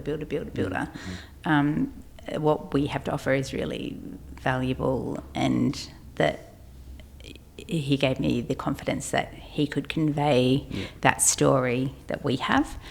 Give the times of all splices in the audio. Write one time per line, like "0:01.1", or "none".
none